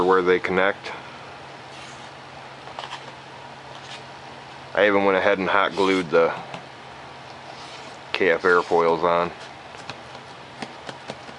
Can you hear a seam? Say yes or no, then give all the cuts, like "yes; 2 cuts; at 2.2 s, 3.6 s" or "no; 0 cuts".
yes; 1 cut; at 7.8 s